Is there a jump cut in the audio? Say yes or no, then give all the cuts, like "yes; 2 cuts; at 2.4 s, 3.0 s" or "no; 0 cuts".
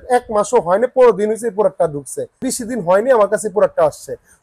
no; 0 cuts